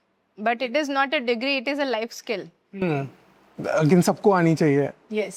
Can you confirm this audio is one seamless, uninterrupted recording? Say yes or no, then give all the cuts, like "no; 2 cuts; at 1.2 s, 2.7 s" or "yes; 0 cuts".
yes; 0 cuts